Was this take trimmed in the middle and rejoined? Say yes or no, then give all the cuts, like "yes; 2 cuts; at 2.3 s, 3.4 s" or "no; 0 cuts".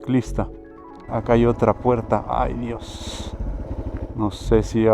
yes; 2 cuts; at 1.1 s, 3.7 s